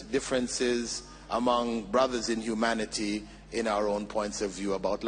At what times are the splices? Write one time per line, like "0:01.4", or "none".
none